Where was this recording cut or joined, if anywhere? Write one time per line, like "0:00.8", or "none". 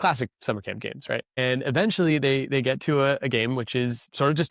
0:01.4